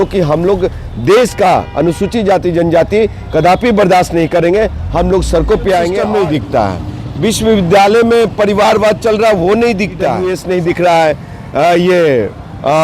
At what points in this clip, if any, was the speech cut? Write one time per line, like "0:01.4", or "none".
0:06.0
0:10.3